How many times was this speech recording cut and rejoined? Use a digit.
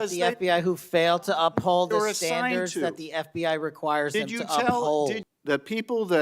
1